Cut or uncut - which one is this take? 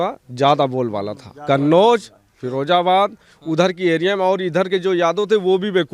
uncut